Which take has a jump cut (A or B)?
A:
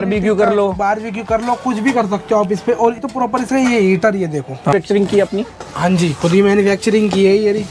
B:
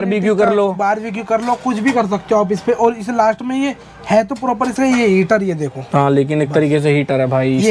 A